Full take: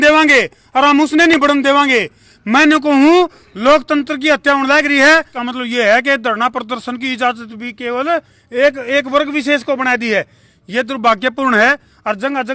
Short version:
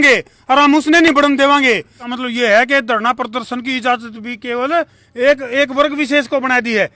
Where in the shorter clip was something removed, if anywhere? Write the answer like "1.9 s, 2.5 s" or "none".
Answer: 2.0 s